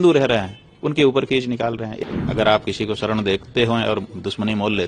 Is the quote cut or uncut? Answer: cut